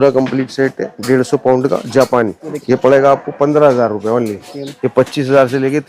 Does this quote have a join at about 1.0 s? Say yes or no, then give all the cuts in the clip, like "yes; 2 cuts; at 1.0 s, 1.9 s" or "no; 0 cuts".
no; 2 cuts; at 2.5 s, 4.5 s